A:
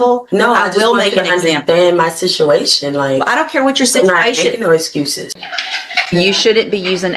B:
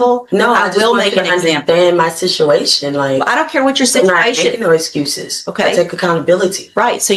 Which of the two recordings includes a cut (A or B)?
A